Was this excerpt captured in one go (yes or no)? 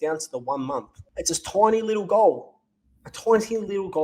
no